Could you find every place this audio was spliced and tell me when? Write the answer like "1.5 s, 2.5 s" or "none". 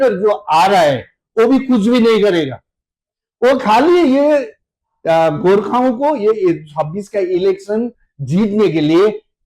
none